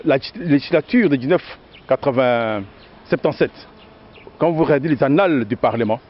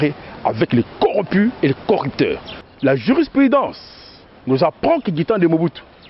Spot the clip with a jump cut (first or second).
second